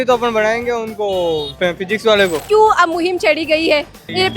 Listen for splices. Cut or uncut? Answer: cut